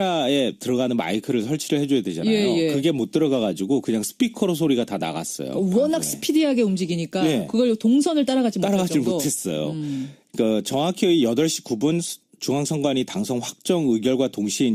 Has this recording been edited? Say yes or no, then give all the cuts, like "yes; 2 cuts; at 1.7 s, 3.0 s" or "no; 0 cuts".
no; 0 cuts